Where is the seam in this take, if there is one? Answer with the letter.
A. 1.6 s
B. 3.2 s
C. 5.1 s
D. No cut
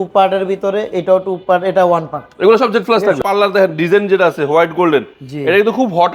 B